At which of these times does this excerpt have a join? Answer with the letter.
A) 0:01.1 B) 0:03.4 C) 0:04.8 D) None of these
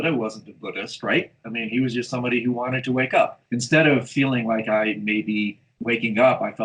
B